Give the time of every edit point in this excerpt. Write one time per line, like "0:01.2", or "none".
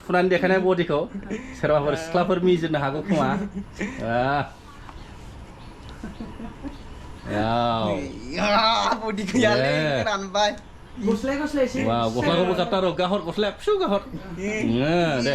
none